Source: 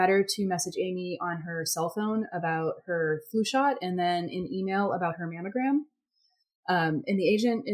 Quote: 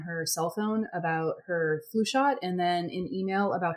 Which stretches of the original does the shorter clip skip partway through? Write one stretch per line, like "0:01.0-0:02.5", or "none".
none